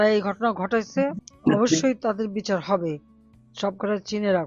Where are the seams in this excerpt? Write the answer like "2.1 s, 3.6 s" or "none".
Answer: 1.3 s